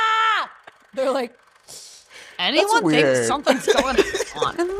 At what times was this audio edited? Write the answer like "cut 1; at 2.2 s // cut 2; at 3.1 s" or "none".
none